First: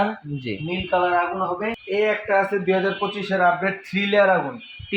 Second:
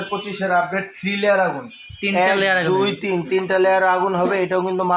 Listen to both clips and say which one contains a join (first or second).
first